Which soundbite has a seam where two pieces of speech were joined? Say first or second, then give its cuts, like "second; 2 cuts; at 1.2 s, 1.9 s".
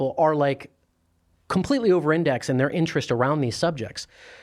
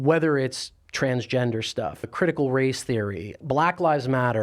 second; 2 cuts; at 2.1 s, 3.4 s